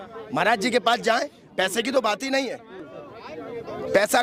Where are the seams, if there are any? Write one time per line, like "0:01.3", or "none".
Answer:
none